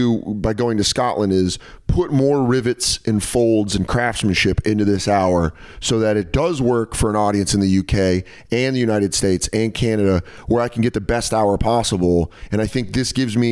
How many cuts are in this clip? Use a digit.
1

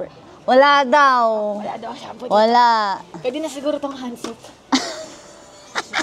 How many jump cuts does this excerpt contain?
0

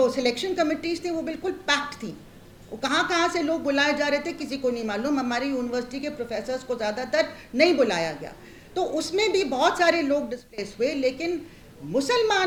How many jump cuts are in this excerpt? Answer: 0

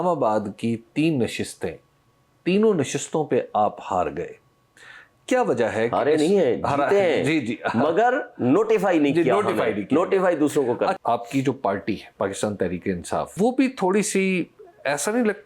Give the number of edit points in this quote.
3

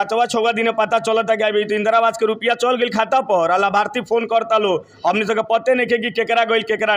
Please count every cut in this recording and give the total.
0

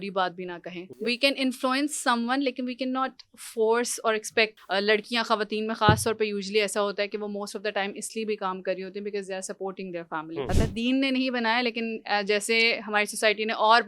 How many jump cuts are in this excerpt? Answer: 3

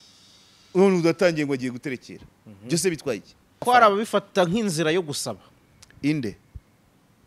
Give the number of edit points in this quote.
1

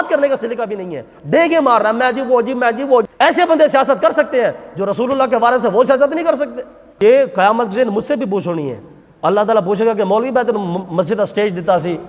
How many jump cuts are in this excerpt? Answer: 2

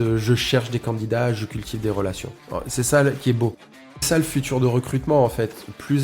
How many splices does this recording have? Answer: 1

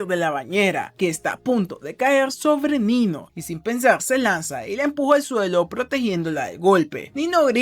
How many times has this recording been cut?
1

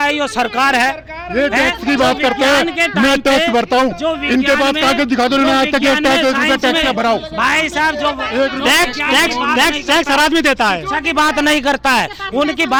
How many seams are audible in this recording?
0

